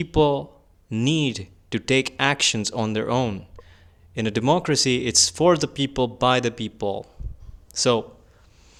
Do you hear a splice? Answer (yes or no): no